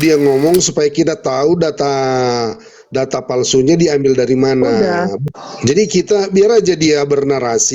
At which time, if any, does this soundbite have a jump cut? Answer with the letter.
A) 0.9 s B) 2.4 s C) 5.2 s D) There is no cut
C